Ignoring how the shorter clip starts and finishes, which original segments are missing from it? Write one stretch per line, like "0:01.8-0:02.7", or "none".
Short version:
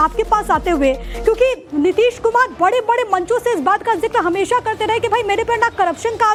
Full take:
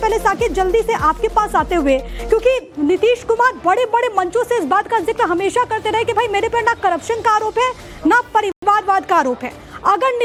none